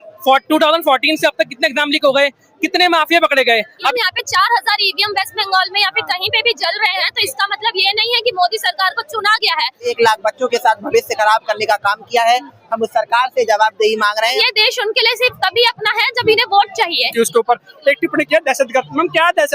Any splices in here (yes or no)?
yes